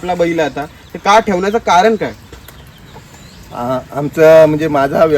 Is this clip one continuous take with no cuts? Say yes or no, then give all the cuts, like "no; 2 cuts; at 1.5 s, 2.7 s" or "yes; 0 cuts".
yes; 0 cuts